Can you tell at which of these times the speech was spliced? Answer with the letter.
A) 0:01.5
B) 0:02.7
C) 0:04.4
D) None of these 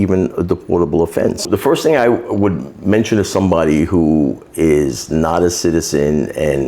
A